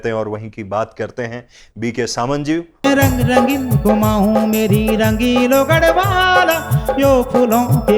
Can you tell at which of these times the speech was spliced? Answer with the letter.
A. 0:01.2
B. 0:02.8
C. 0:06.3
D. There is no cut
B